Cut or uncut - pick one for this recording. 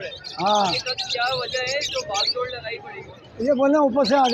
uncut